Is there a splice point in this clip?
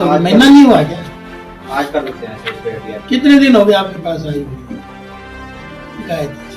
no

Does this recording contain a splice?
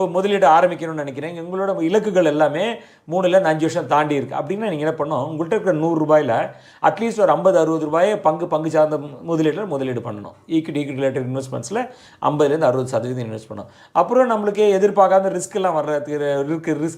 no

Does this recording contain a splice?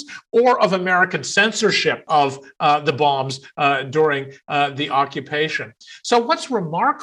yes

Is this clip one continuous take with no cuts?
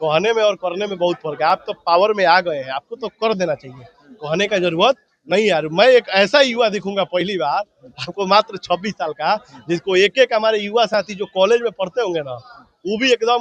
yes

